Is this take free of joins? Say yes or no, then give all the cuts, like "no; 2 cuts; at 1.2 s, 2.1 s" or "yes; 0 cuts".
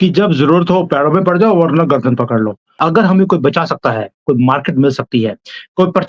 no; 1 cut; at 2.7 s